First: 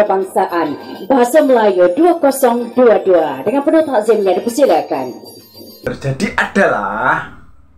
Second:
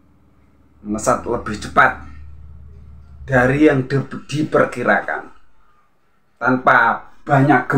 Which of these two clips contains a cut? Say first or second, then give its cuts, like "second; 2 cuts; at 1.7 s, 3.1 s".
first; 1 cut; at 5.8 s